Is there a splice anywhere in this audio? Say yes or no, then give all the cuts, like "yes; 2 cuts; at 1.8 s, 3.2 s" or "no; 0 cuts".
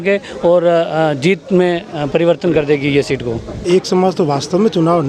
yes; 1 cut; at 3.6 s